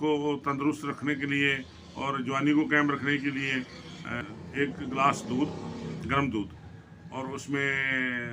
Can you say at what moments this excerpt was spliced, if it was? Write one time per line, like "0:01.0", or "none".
0:04.2